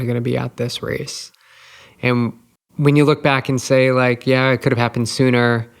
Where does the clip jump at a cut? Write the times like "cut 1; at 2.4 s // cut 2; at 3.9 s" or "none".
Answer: cut 1; at 2.5 s